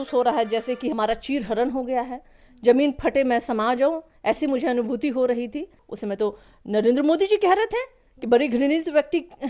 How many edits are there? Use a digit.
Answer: 2